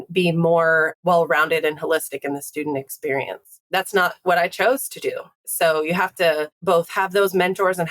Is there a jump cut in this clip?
yes; 3 cuts; at 0.9 s, 5.4 s, 6.5 s

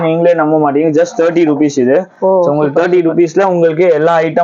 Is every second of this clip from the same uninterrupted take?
yes; 0 cuts

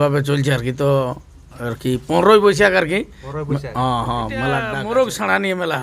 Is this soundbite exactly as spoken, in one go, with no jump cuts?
no; 1 cut; at 4.7 s

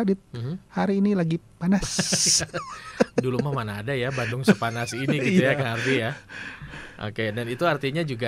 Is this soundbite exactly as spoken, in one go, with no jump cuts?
yes; 0 cuts

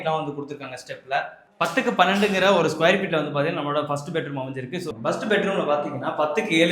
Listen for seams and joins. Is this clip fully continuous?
no; 1 cut; at 1.5 s

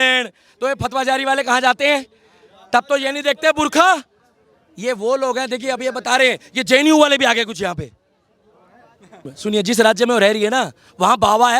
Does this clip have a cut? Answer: yes; 1 cut; at 9.3 s

